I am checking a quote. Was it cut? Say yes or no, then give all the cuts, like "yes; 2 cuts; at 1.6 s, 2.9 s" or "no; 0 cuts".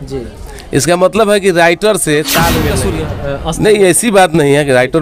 yes; 1 cut; at 2.7 s